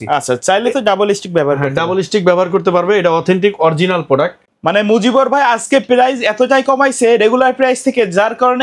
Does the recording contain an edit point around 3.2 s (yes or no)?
no